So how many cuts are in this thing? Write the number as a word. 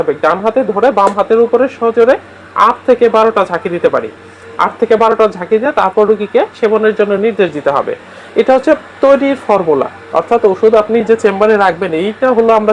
zero